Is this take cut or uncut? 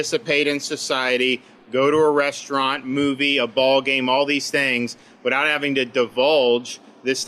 uncut